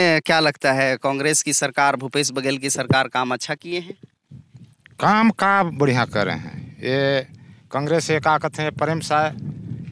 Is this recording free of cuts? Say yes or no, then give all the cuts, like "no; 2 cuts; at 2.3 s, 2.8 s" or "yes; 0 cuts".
yes; 0 cuts